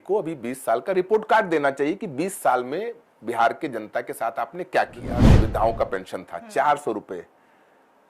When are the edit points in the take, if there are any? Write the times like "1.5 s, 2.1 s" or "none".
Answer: 5.4 s